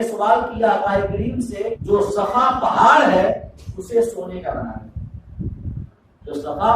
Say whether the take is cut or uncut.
cut